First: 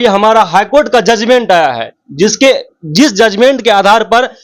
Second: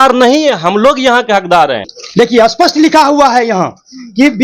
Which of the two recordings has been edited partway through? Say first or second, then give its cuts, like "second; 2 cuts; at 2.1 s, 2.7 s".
second; 1 cut; at 2.0 s